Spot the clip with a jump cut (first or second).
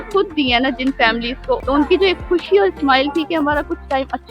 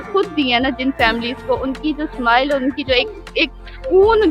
first